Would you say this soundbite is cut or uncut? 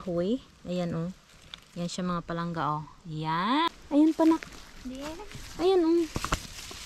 cut